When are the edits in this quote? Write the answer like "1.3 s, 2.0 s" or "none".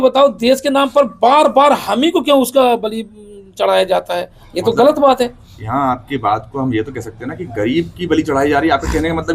none

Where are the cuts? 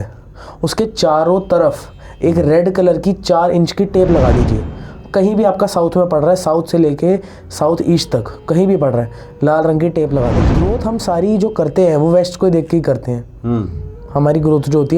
10.4 s

